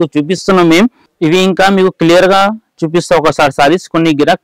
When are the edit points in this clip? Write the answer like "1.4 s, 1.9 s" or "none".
1.0 s